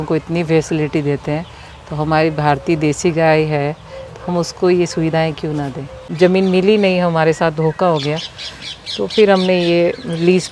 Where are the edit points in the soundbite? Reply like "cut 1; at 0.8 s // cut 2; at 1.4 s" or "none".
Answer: cut 1; at 6.0 s